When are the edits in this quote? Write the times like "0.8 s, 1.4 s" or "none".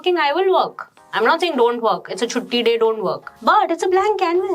3.3 s

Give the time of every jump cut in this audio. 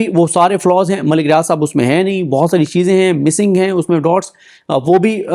none

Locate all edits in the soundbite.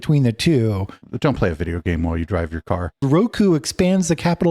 1.0 s, 3.0 s

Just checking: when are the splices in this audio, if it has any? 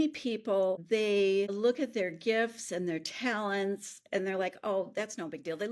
0.8 s, 1.5 s

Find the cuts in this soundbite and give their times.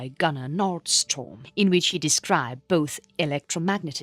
3.0 s

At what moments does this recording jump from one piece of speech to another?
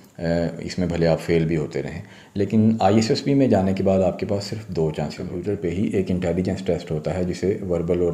5.3 s

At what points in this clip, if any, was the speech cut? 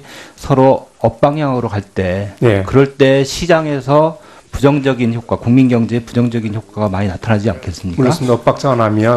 none

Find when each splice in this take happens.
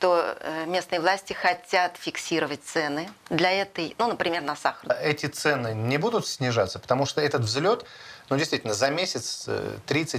4.9 s

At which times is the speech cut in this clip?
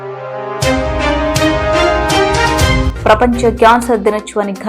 2.9 s

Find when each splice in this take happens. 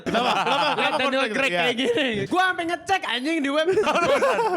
2.2 s, 3.8 s

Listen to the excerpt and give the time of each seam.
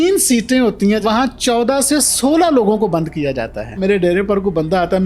1.0 s, 3.8 s

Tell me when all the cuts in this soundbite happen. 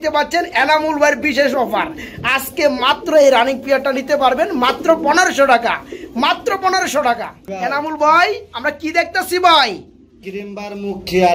none

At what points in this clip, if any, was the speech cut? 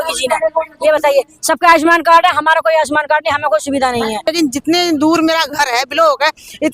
4.3 s

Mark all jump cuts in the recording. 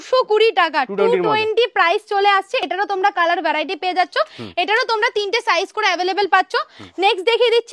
none

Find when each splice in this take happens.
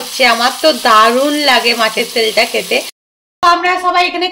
3.0 s

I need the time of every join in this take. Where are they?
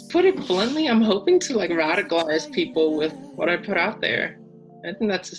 none

